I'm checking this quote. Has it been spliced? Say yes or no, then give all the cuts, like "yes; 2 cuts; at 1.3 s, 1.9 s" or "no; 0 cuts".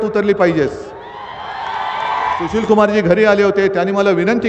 yes; 1 cut; at 2.5 s